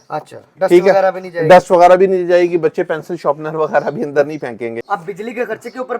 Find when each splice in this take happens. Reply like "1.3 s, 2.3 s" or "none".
5.0 s